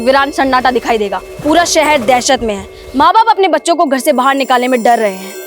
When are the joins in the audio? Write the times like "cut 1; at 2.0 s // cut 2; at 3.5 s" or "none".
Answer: cut 1; at 1.2 s